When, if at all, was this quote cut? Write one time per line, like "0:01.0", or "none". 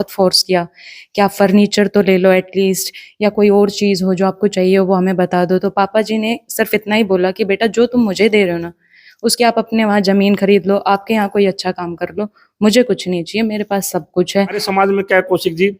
0:14.6